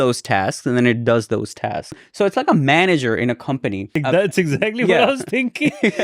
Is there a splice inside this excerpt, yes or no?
yes